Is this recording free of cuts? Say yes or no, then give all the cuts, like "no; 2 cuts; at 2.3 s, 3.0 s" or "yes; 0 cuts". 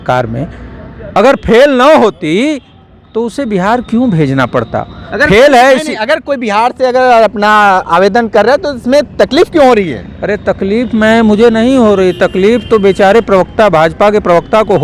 yes; 0 cuts